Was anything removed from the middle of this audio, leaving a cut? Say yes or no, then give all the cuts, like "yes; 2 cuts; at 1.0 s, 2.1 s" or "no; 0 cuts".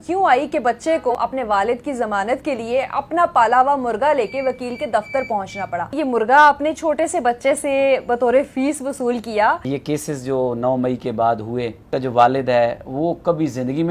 yes; 4 cuts; at 1.1 s, 5.9 s, 9.6 s, 11.8 s